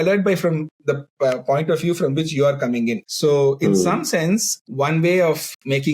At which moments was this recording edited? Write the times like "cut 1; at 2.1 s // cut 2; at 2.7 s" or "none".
cut 1; at 3.1 s // cut 2; at 4.6 s